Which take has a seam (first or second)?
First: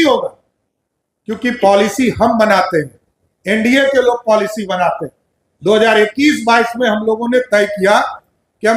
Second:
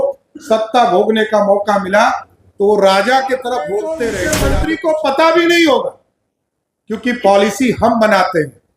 second